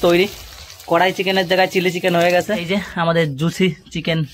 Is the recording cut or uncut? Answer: cut